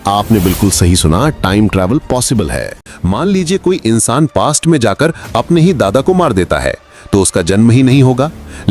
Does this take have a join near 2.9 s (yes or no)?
yes